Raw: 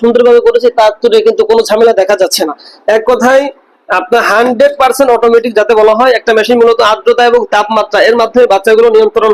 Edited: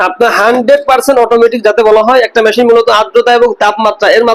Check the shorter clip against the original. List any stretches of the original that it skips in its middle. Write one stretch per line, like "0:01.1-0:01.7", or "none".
none